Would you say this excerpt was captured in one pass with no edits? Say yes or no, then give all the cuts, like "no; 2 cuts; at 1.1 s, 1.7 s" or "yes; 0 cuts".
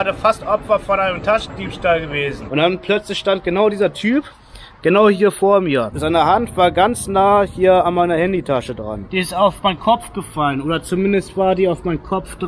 no; 3 cuts; at 2.4 s, 5.9 s, 9.0 s